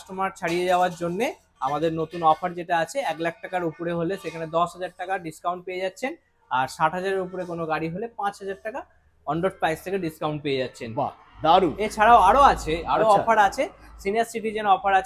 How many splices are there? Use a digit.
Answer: 0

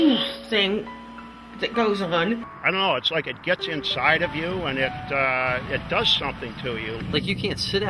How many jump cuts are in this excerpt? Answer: 2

